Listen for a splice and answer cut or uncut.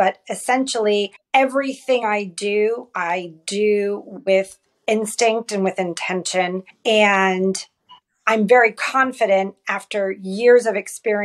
cut